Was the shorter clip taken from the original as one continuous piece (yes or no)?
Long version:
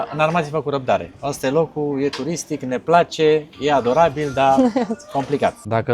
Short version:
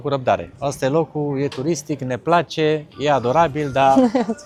yes